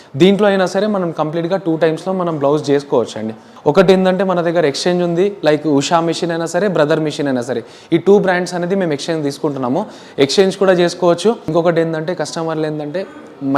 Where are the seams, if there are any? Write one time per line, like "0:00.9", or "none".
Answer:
0:03.5
0:11.5